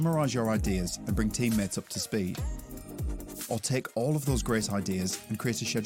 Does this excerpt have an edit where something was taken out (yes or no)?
yes